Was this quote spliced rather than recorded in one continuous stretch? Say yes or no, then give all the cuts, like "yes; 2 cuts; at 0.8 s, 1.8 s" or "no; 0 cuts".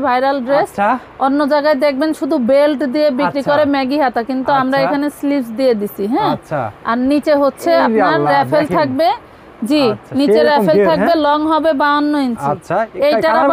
no; 0 cuts